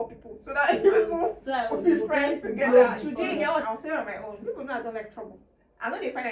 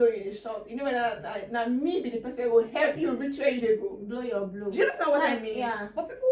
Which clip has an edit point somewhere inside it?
first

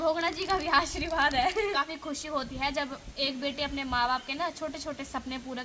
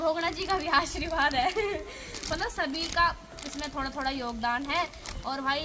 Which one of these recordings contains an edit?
first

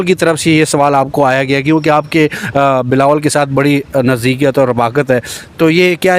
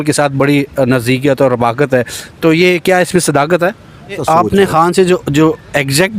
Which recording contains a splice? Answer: second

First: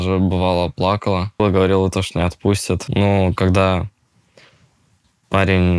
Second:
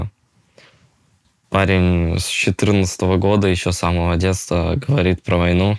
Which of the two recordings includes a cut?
first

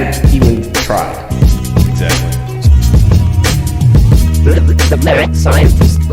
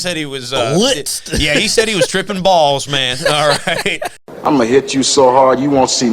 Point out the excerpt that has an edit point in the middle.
second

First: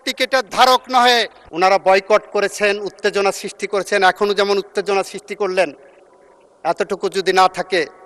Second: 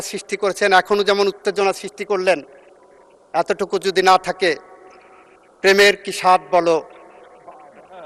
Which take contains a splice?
first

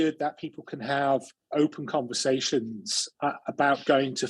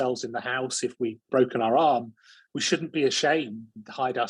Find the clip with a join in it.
second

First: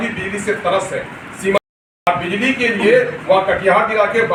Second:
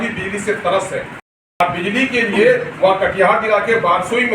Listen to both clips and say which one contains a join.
second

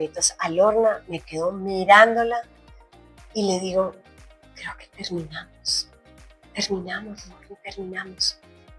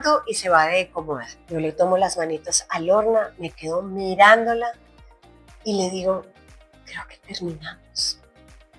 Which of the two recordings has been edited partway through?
second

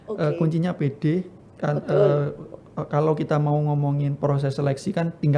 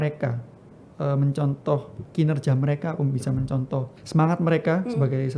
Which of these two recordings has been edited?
second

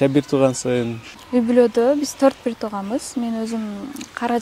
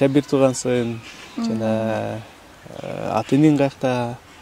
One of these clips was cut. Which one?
first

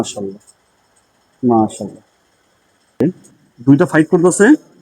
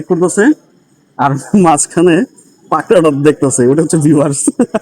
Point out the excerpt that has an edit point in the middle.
first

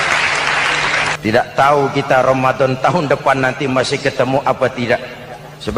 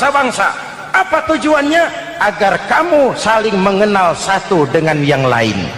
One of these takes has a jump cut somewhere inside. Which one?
first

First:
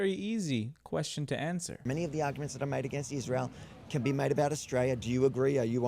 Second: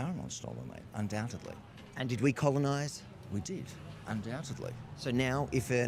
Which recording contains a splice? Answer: first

